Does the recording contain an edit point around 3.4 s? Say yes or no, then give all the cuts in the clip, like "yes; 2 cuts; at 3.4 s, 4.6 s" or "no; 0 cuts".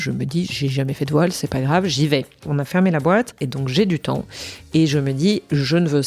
yes; 2 cuts; at 2.4 s, 3.4 s